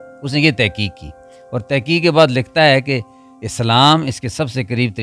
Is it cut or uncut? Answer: uncut